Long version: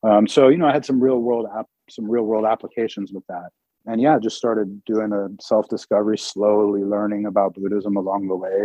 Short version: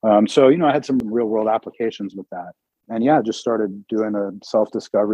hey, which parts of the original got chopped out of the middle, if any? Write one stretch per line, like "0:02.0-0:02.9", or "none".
0:01.0-0:02.0